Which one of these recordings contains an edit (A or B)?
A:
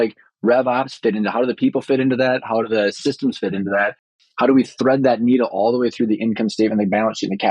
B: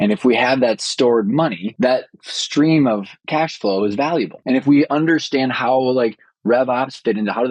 B